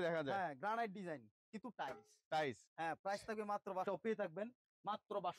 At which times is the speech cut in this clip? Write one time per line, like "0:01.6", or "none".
0:03.8